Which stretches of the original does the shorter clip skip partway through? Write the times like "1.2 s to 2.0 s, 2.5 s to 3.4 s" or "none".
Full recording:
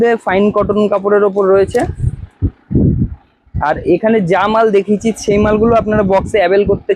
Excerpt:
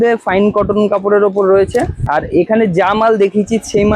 2.0 s to 3.5 s